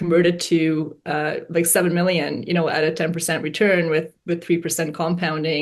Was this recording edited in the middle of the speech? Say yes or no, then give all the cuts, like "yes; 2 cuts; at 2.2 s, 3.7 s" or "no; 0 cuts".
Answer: no; 0 cuts